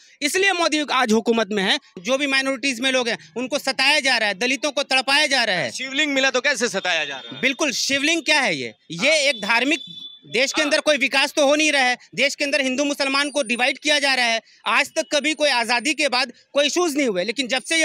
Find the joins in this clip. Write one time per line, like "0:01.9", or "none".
0:02.0